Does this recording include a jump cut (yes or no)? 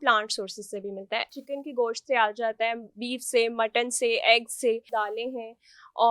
yes